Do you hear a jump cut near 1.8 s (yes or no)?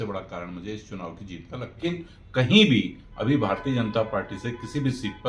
yes